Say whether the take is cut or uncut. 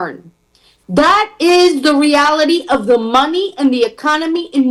uncut